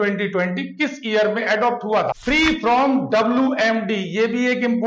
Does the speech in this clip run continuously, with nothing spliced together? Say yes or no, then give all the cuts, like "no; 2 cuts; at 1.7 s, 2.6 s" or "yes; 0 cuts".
no; 1 cut; at 2.2 s